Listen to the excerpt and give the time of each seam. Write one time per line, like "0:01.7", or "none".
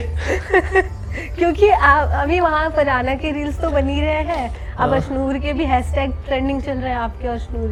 none